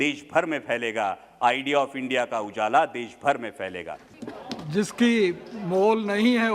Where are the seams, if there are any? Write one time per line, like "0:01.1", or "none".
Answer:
0:04.0